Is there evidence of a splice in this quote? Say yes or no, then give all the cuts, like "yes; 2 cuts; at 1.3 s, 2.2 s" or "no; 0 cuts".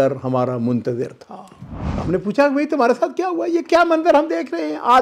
yes; 1 cut; at 2.0 s